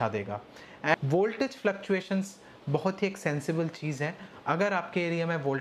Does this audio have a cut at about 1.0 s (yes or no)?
yes